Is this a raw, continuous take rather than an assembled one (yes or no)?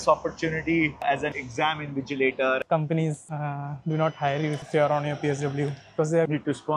no